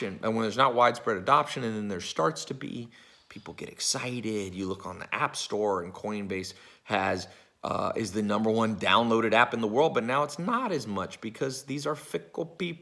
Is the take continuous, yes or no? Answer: yes